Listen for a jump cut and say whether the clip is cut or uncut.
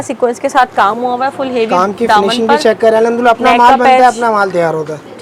uncut